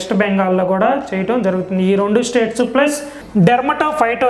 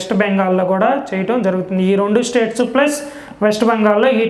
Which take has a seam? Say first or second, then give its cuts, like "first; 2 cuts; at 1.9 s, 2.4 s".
first; 1 cut; at 3.2 s